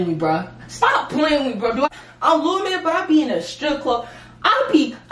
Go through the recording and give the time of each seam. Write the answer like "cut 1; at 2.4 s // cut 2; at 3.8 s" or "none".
cut 1; at 1.9 s

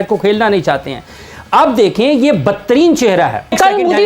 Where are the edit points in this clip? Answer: none

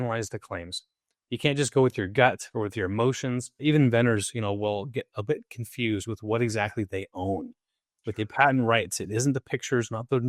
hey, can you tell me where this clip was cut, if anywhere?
cut 1; at 3.5 s

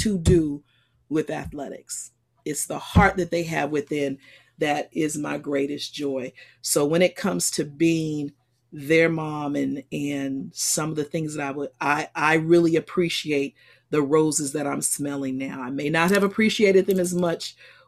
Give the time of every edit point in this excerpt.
none

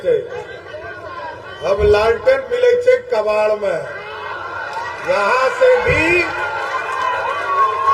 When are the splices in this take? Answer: none

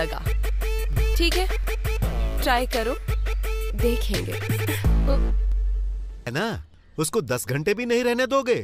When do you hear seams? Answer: cut 1; at 6.3 s

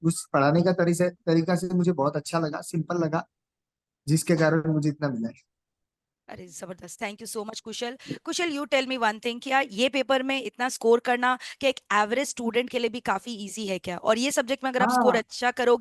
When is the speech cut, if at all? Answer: none

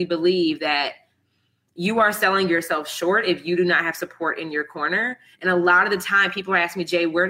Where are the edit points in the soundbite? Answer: none

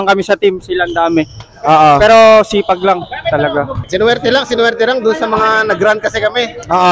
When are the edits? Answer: cut 1; at 3.8 s

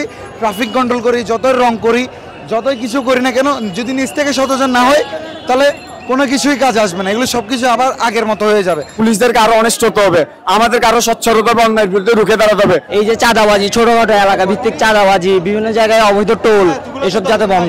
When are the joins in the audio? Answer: cut 1; at 8.9 s // cut 2; at 12.9 s

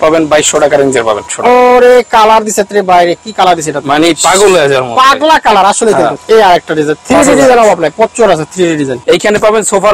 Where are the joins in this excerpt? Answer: cut 1; at 1.3 s // cut 2; at 6.2 s // cut 3; at 9.0 s

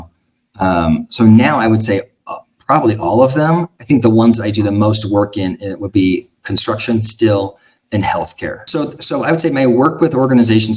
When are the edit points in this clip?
cut 1; at 8.6 s

